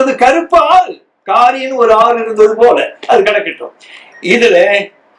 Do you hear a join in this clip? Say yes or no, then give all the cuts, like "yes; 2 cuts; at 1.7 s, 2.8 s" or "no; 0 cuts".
no; 0 cuts